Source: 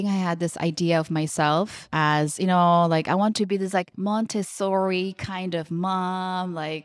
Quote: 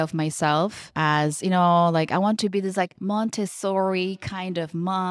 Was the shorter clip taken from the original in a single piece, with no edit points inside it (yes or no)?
yes